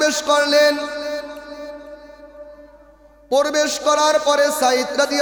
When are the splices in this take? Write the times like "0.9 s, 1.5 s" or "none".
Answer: none